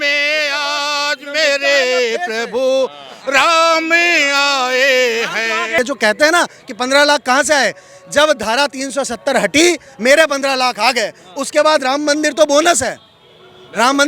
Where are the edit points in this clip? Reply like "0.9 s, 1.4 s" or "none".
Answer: 5.8 s

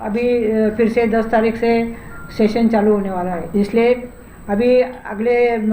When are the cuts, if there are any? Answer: 3.4 s

